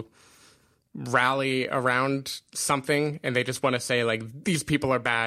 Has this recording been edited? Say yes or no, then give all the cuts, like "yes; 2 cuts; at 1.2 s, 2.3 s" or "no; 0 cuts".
yes; 1 cut; at 4.2 s